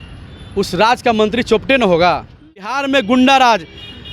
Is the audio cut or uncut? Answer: cut